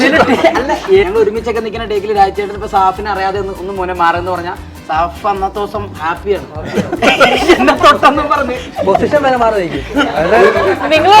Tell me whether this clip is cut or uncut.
cut